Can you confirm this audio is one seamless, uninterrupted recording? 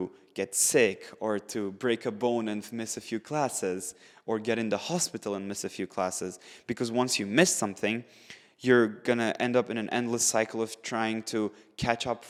yes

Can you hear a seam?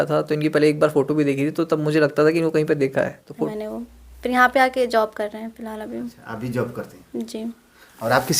yes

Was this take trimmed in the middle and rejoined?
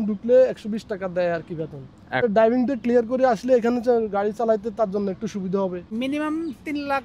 yes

